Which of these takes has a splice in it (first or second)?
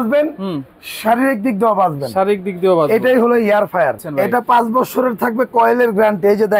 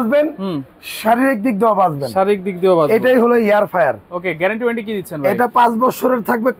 first